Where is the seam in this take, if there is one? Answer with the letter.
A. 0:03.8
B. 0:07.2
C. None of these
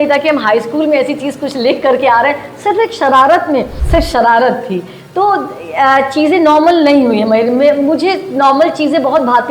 A